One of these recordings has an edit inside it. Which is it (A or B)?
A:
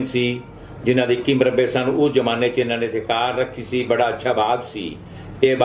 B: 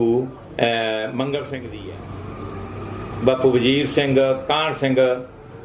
B